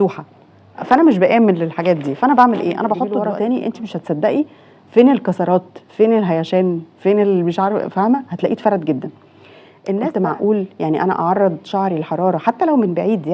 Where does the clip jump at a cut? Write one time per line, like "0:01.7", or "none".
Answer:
0:03.1
0:10.0

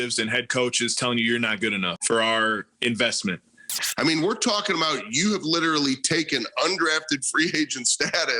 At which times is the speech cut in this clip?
0:02.0
0:03.8

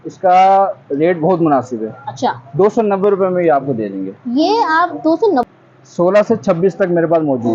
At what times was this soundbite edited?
0:05.5

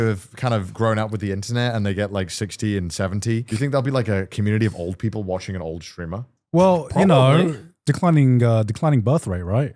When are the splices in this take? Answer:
0:03.5

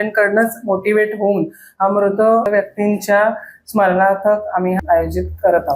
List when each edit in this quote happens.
0:02.5
0:04.8

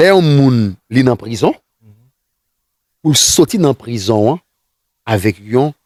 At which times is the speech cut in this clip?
none

